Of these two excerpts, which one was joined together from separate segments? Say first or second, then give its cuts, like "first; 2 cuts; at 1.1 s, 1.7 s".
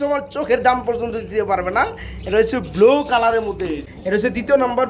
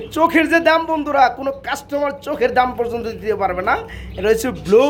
first; 1 cut; at 3.9 s